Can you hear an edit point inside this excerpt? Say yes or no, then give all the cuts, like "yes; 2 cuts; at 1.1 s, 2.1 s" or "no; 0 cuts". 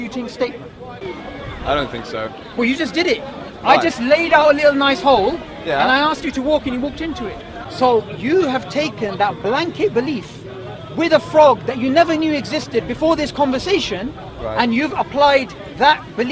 yes; 2 cuts; at 0.9 s, 7.6 s